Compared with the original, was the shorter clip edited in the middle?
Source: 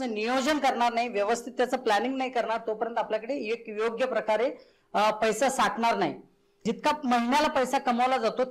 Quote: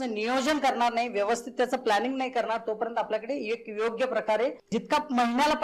yes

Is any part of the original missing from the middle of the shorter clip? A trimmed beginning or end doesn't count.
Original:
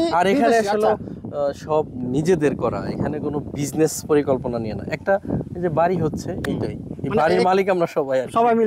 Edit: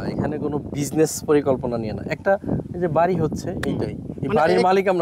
no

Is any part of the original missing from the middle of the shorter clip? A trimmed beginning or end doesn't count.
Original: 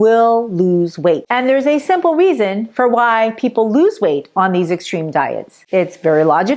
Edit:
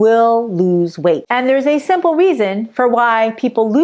no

